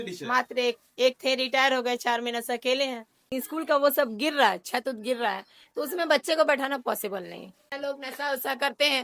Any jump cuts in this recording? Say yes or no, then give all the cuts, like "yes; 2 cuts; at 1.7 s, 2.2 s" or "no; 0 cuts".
yes; 2 cuts; at 3.2 s, 7.7 s